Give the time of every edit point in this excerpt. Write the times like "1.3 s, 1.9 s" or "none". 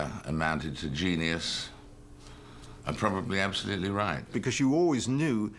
4.3 s